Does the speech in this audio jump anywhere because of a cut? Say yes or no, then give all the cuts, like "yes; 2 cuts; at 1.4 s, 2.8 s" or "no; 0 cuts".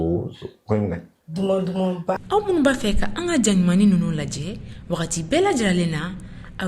yes; 1 cut; at 2.2 s